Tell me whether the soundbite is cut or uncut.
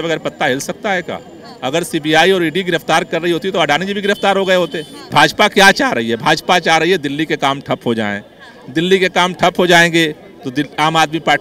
cut